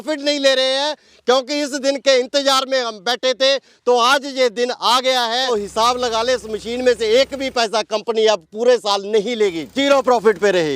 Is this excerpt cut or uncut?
cut